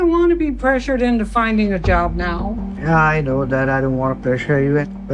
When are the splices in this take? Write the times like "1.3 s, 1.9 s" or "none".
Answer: none